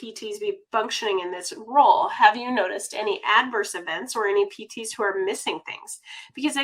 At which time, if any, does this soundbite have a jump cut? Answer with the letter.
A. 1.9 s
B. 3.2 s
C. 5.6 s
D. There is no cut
D